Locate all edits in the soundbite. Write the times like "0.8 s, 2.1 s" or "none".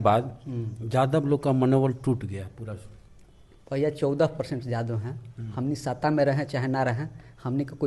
none